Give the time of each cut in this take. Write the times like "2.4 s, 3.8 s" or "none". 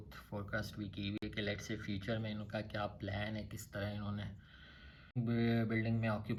none